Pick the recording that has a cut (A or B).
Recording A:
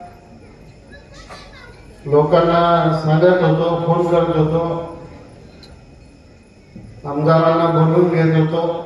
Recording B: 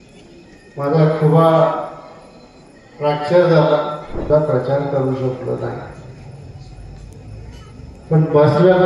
B